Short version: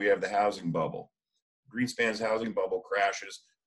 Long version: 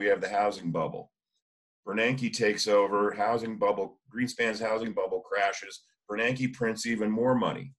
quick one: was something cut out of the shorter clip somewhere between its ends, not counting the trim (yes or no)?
yes